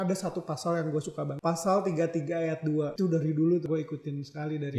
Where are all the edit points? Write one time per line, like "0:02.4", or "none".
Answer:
0:01.3
0:02.9
0:03.6